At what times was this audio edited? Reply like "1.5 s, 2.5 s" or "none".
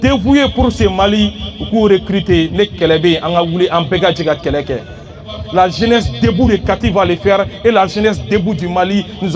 5.4 s